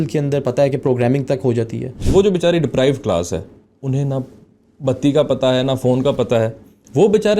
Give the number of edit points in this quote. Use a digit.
1